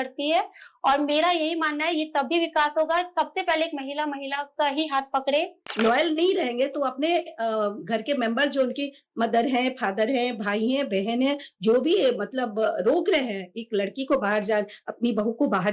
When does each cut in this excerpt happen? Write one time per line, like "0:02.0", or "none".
0:05.6